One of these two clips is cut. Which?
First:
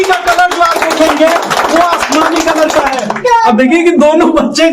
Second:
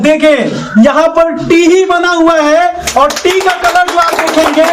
first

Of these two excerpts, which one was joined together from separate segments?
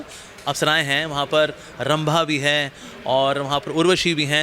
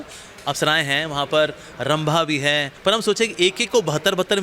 second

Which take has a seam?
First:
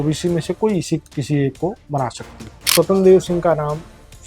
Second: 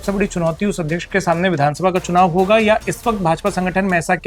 first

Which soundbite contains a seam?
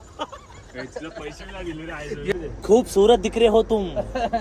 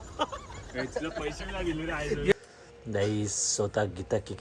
first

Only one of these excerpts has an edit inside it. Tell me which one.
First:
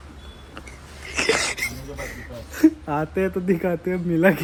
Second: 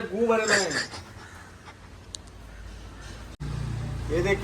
second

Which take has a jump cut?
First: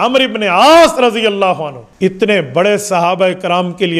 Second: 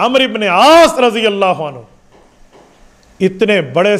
first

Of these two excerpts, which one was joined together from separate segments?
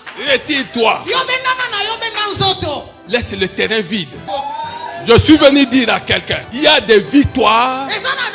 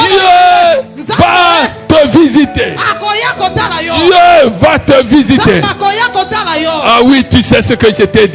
first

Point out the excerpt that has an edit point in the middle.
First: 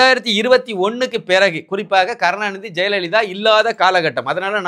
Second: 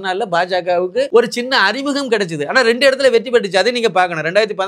second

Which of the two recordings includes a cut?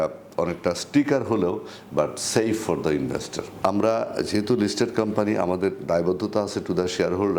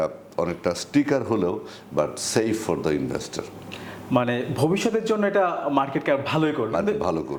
first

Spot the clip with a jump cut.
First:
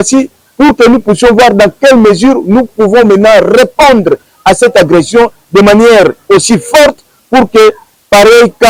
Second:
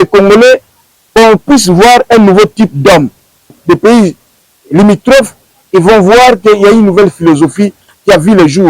second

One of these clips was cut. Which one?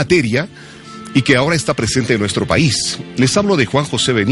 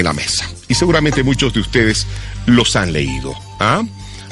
second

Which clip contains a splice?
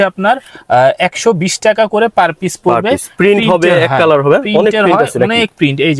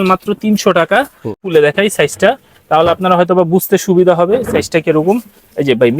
second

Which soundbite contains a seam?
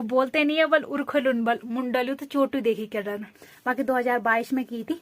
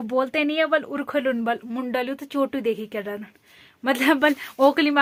first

